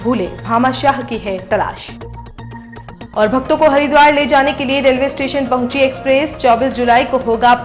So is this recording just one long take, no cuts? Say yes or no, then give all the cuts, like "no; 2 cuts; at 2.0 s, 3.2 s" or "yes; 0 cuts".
yes; 0 cuts